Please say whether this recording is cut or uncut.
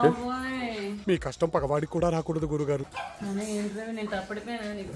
cut